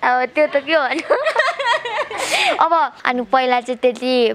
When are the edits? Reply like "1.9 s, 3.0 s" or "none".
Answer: 3.0 s